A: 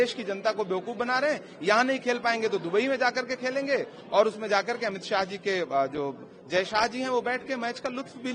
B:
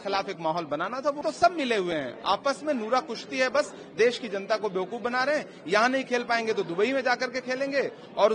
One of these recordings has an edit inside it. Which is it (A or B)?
B